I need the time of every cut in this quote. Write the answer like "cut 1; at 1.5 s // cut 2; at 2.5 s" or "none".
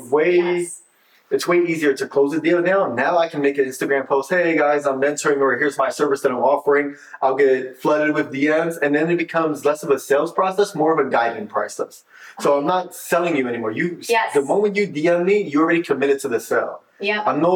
none